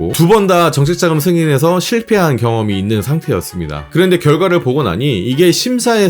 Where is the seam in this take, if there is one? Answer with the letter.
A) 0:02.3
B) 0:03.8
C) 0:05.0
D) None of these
B